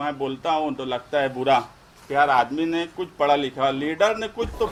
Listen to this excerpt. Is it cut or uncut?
uncut